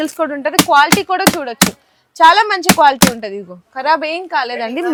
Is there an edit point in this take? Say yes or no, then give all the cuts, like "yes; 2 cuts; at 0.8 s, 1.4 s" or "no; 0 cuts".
no; 0 cuts